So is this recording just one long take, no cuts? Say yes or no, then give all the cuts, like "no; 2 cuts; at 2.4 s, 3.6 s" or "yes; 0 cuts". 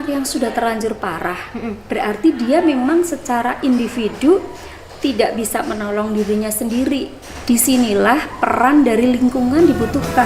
yes; 0 cuts